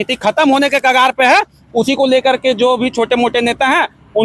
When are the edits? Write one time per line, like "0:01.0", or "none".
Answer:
none